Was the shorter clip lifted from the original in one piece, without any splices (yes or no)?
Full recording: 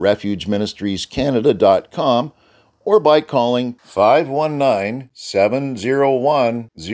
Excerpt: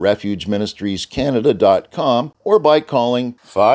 no